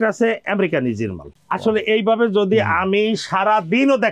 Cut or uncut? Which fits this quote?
uncut